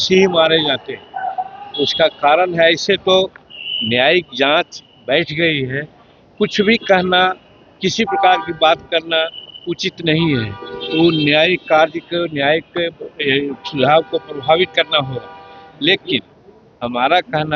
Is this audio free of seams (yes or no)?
yes